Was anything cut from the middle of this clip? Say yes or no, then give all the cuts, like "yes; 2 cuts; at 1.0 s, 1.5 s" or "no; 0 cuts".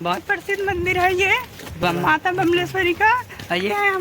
yes; 1 cut; at 1.8 s